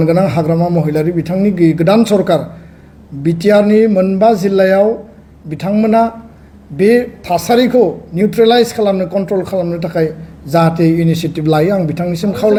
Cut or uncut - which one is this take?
uncut